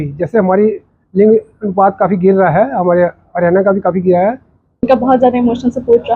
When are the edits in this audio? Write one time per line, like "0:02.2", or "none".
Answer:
0:04.8